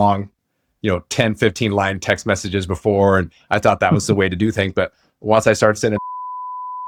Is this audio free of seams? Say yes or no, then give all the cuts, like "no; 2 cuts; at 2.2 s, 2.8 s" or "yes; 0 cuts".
yes; 0 cuts